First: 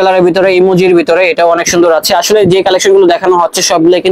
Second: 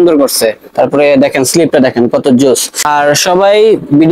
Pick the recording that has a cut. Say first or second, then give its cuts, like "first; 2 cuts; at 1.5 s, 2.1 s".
second; 1 cut; at 2.8 s